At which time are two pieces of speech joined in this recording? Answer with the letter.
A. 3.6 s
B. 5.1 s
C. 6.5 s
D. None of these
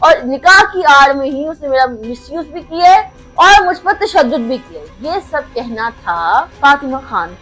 C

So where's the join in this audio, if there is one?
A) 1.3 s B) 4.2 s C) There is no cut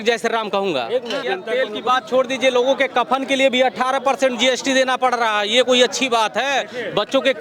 A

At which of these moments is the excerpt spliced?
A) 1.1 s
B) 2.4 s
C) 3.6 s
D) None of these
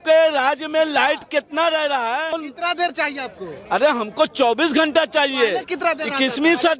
B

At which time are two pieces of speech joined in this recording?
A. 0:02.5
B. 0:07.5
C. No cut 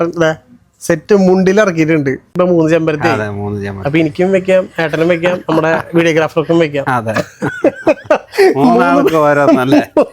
A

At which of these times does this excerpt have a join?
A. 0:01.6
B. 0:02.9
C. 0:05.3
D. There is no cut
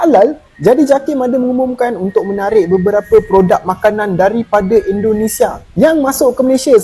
D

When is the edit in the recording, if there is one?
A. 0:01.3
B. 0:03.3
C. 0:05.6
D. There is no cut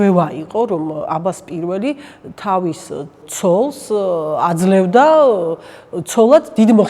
B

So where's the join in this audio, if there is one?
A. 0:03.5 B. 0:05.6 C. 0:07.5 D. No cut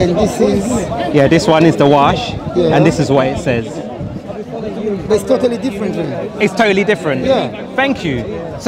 D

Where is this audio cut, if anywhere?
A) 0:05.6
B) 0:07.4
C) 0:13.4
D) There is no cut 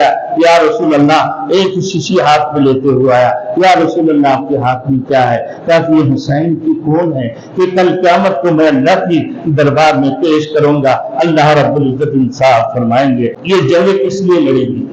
C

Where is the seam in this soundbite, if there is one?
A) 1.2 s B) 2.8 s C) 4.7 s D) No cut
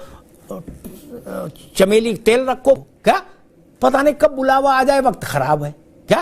B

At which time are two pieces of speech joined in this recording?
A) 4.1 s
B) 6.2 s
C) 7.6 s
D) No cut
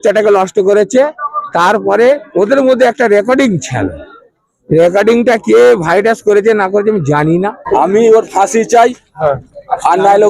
C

